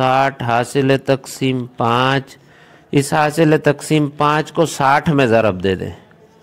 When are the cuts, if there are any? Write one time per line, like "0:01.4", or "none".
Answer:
none